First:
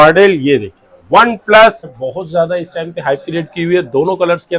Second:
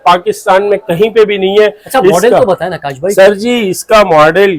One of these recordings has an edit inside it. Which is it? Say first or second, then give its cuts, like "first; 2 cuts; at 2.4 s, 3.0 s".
first; 1 cut; at 1.8 s